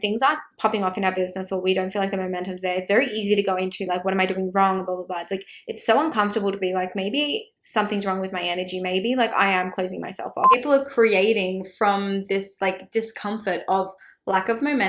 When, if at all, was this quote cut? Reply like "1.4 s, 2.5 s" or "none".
10.6 s